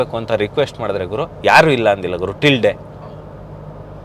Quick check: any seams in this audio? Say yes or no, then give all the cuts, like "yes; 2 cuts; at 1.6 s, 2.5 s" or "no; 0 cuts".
no; 0 cuts